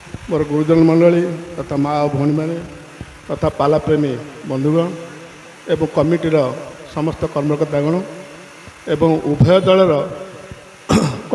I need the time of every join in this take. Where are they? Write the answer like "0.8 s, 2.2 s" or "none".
none